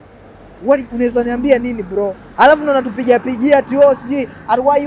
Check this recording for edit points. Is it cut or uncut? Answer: cut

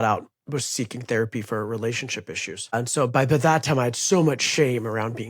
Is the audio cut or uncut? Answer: cut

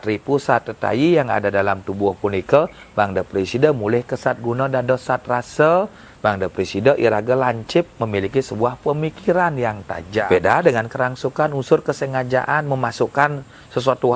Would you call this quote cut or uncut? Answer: cut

